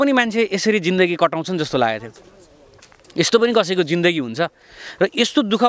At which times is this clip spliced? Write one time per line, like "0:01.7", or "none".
none